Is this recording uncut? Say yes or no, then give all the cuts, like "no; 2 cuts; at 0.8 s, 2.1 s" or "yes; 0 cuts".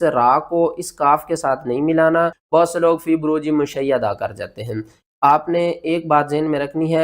no; 1 cut; at 2.4 s